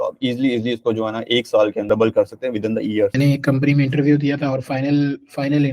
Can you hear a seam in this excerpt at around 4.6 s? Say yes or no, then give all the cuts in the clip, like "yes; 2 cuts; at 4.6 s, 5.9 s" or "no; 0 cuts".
no; 2 cuts; at 1.9 s, 3.1 s